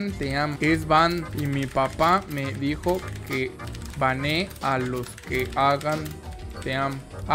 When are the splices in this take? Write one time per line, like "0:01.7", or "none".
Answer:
none